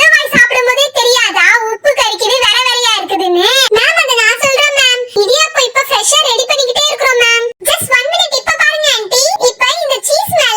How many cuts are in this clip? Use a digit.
2